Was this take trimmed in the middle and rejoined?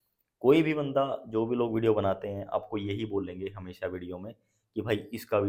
no; 0 cuts

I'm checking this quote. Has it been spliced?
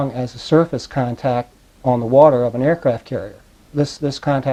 no; 0 cuts

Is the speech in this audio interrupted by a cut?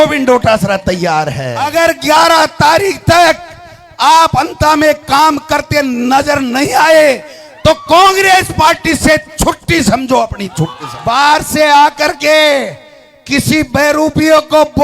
yes; 2 cuts; at 1.6 s, 10.9 s

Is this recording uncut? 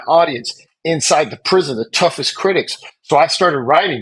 yes; 0 cuts

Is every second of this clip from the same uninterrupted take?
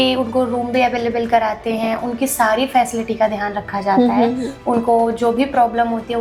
yes; 0 cuts

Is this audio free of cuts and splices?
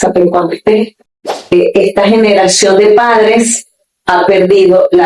no; 1 cut; at 1.5 s

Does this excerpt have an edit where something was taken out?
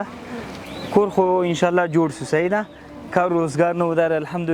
no; 0 cuts

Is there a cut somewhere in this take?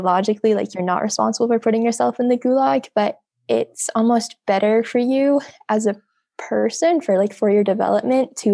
no; 0 cuts

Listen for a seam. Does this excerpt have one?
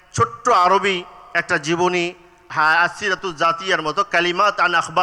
no; 0 cuts

